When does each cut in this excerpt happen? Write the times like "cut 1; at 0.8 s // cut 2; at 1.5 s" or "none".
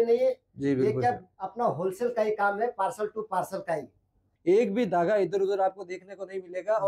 cut 1; at 4.3 s